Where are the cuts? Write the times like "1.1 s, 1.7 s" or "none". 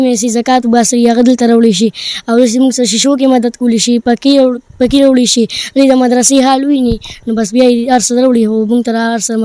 none